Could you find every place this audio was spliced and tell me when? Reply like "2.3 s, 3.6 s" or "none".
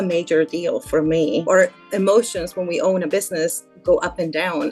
1.4 s